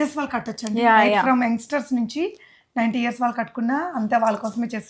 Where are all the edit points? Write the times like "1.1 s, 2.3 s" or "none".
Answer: none